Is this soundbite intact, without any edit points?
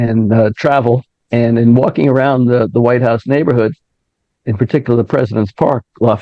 no; 1 cut; at 1.2 s

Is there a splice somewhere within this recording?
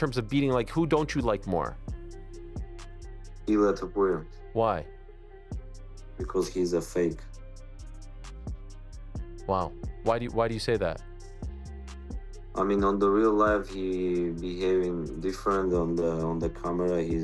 yes; 2 cuts; at 1.8 s, 3.3 s

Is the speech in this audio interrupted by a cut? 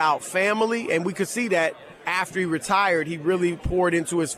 yes; 1 cut; at 2.1 s

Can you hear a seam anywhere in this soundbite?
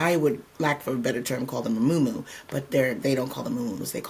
no; 0 cuts

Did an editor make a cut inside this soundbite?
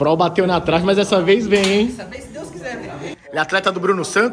yes; 1 cut; at 3.1 s

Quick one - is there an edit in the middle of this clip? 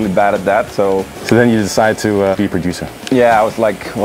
yes; 2 cuts; at 1.1 s, 2.3 s

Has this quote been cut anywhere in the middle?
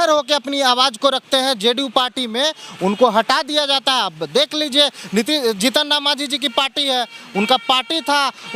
no; 0 cuts

